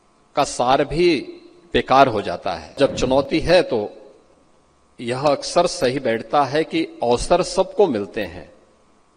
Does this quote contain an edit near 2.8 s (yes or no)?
yes